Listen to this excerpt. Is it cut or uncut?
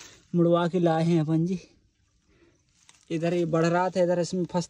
uncut